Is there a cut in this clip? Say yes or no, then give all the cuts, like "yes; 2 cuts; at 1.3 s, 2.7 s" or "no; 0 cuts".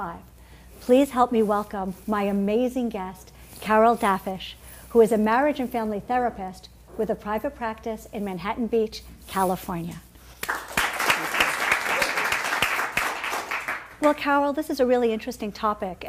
yes; 1 cut; at 6.2 s